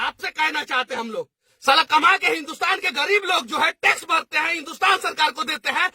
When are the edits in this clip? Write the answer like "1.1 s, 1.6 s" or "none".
0.9 s